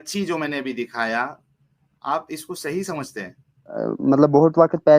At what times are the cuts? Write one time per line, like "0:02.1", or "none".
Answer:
0:03.8